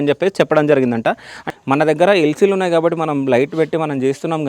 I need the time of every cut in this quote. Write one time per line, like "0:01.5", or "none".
0:01.4